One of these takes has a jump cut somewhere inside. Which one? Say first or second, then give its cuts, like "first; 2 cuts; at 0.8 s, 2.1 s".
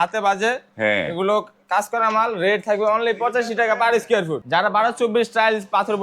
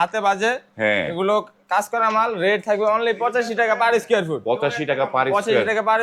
first; 1 cut; at 4.4 s